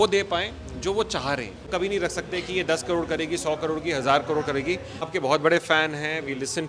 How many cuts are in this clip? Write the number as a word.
two